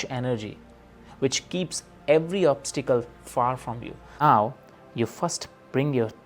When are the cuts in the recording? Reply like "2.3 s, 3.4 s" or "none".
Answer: 4.2 s